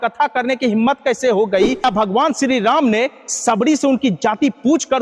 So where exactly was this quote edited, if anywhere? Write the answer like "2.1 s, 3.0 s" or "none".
1.8 s